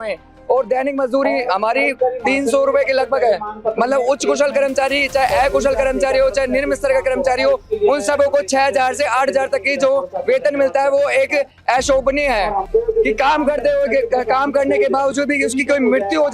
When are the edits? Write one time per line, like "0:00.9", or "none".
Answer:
0:12.6